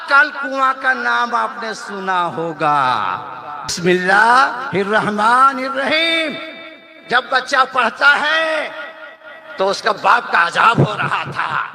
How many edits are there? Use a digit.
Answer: 1